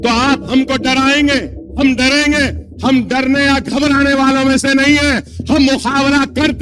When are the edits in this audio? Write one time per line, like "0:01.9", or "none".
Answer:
0:01.6